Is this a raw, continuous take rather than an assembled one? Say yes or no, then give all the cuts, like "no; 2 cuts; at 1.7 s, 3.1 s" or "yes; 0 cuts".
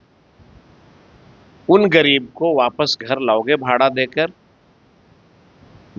yes; 0 cuts